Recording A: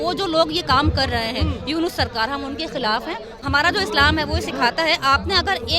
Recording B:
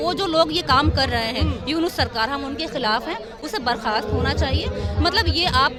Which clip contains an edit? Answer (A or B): A